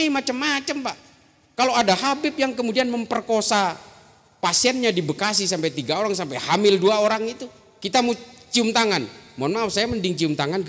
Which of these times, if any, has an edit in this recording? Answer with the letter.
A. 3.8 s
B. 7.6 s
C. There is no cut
C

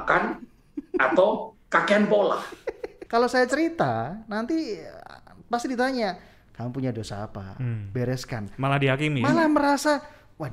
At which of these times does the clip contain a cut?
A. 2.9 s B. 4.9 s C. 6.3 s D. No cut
A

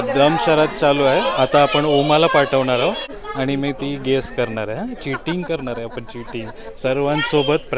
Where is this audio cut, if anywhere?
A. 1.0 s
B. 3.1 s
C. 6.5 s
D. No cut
B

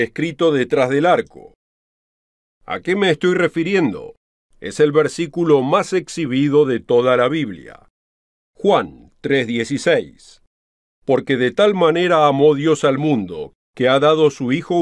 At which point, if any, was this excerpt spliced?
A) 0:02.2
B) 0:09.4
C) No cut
B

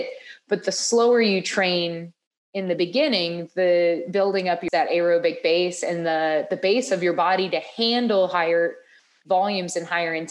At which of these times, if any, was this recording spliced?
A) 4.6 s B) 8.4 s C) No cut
A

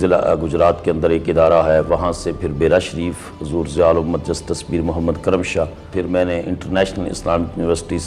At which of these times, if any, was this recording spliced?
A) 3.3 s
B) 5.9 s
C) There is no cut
B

